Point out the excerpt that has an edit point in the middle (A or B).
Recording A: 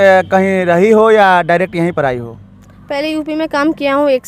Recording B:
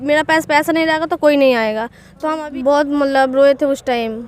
B